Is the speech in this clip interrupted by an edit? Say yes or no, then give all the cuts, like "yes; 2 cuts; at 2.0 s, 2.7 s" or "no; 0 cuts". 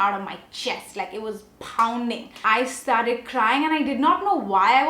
yes; 1 cut; at 2.3 s